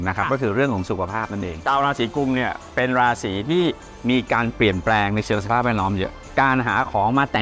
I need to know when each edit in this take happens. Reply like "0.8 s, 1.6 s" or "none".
1.6 s, 6.2 s

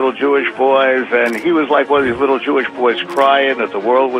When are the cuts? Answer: none

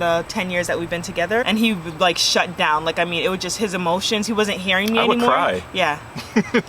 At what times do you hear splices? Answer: 1.4 s

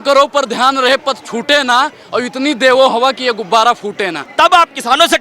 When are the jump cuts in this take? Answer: 4.3 s

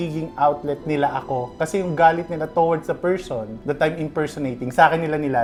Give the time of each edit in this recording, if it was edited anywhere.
none

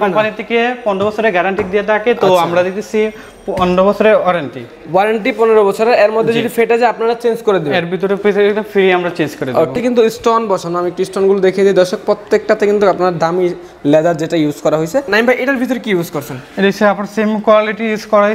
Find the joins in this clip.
9.7 s, 15.1 s

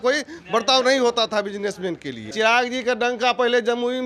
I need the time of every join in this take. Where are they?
2.3 s

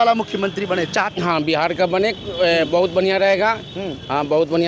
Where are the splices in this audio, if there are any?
1.1 s

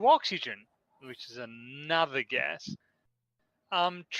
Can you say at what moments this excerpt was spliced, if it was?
3.0 s

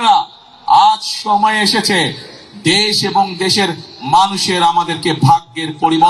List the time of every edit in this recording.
none

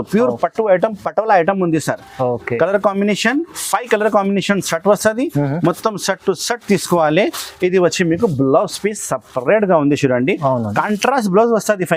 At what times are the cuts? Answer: none

